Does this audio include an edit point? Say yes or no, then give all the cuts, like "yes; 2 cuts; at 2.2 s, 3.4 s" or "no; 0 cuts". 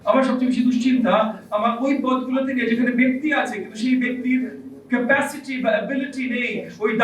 no; 0 cuts